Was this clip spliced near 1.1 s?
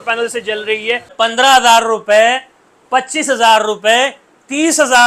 yes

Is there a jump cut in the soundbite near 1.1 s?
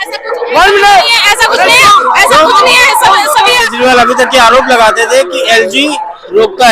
no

